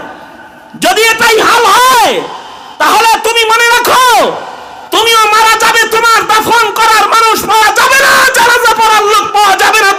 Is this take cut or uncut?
uncut